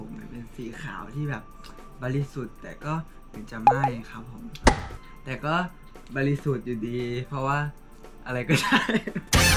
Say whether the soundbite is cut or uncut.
uncut